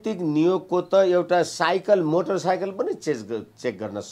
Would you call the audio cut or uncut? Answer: uncut